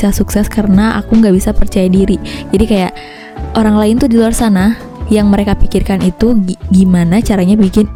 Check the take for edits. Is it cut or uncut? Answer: uncut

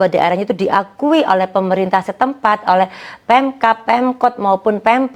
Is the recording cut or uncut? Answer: uncut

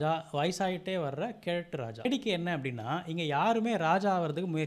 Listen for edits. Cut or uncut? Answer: cut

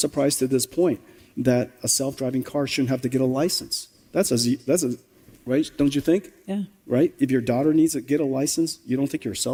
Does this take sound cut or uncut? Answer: uncut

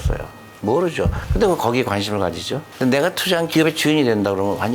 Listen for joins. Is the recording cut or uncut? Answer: cut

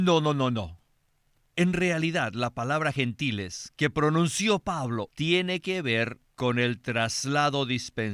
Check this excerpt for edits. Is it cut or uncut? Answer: cut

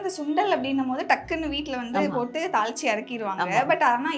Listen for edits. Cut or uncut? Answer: uncut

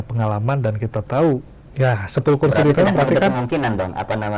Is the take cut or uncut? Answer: cut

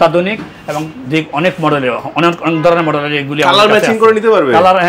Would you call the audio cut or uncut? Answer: uncut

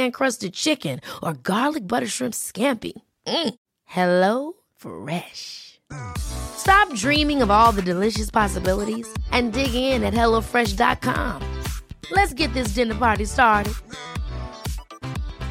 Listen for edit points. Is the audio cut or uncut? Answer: uncut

